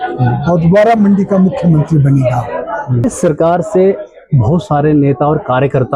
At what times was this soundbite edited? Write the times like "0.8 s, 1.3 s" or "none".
3.0 s